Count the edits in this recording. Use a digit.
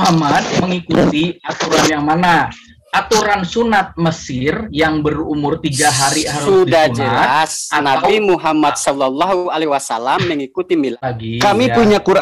1